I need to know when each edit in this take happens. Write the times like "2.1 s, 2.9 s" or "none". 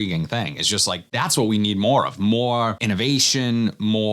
1.1 s, 2.8 s